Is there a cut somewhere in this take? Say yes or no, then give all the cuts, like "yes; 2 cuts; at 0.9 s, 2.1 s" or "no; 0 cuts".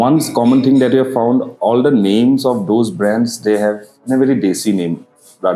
no; 0 cuts